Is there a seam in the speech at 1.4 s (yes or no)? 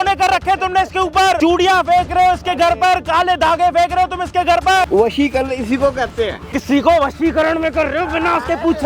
yes